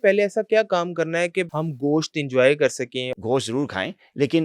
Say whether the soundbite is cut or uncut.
cut